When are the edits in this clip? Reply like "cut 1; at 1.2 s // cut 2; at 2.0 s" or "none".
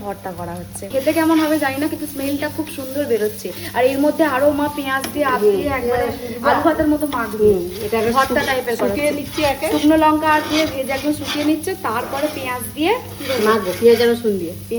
none